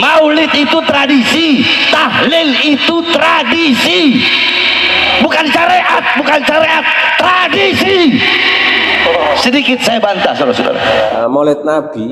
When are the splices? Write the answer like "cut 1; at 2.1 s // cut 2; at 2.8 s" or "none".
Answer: cut 1; at 11.1 s